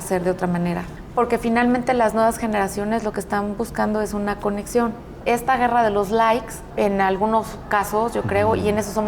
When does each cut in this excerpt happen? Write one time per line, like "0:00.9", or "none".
0:01.0
0:05.1
0:06.6